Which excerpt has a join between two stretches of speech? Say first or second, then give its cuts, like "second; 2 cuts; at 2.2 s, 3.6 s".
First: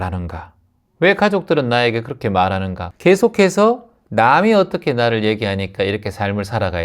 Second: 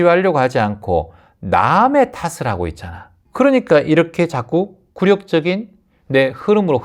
first; 1 cut; at 2.8 s